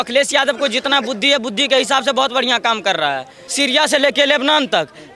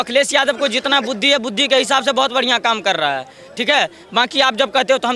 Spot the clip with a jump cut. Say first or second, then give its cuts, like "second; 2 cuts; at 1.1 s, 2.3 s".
first; 1 cut; at 3.4 s